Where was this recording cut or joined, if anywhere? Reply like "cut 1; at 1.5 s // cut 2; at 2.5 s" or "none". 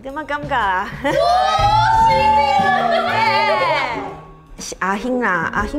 none